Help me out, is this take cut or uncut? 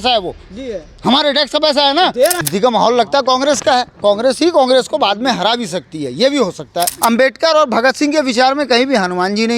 cut